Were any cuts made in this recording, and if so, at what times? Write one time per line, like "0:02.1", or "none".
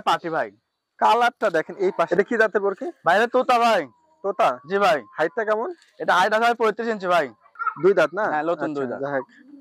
0:02.1
0:07.4